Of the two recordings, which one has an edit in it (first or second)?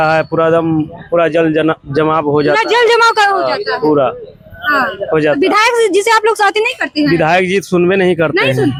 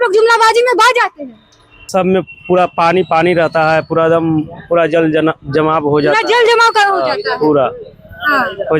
second